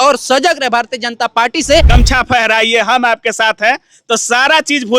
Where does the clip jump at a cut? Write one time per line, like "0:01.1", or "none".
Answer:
0:01.9